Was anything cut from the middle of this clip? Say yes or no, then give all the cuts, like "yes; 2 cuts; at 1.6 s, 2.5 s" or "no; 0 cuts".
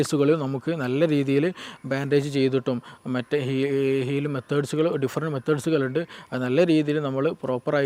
no; 0 cuts